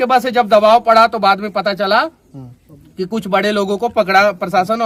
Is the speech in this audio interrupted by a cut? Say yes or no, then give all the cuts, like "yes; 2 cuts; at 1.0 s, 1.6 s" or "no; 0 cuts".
no; 0 cuts